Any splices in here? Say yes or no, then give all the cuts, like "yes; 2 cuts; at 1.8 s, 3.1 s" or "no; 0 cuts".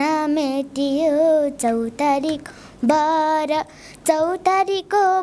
no; 0 cuts